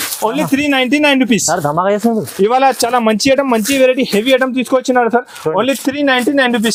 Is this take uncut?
yes; 0 cuts

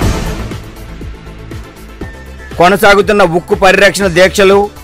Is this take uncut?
no; 1 cut; at 2.1 s

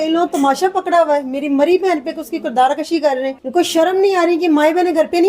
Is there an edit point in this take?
yes; 1 cut; at 3.4 s

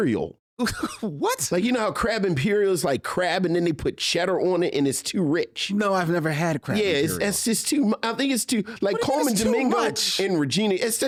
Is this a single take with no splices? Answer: yes; 0 cuts

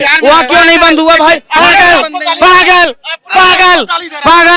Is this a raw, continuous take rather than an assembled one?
yes; 0 cuts

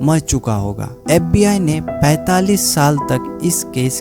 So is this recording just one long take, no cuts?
no; 1 cut; at 1.0 s

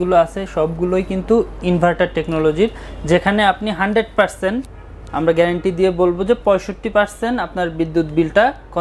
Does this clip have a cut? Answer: no; 0 cuts

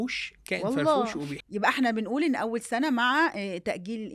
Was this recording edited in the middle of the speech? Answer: yes; 1 cut; at 1.4 s

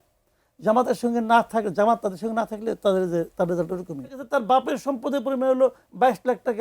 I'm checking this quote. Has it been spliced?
yes; 1 cut; at 4.2 s

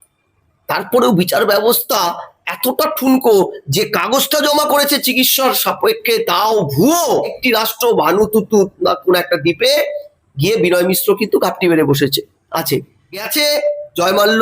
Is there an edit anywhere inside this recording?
yes; 2 cuts; at 7.3 s, 13.3 s

